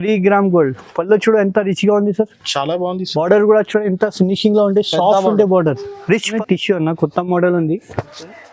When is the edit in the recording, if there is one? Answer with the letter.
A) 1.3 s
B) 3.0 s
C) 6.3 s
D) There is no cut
C